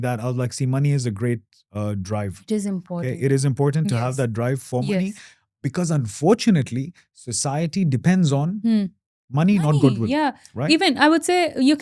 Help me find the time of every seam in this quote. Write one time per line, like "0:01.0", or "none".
none

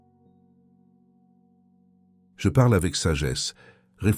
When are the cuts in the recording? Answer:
0:02.4

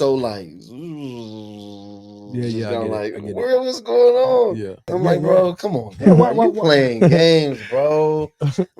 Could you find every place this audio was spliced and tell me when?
0:04.9

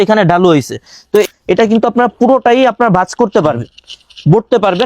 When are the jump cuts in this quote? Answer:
0:01.2

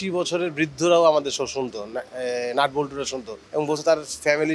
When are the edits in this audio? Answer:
none

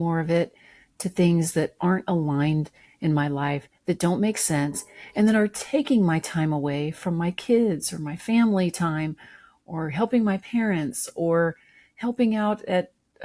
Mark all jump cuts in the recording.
none

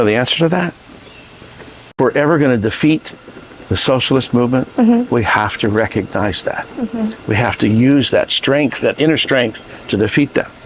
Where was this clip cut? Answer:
0:01.9

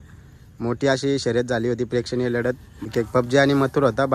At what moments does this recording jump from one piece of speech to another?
0:02.9

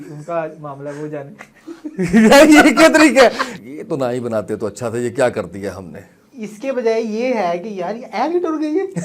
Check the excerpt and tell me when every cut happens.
0:03.5

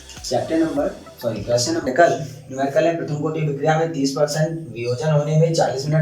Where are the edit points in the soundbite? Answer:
0:01.9

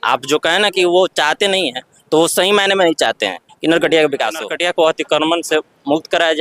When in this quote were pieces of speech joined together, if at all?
0:04.5

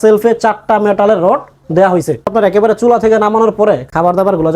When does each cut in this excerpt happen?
0:02.3

